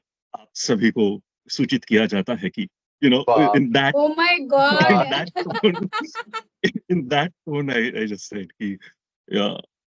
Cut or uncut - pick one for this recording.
uncut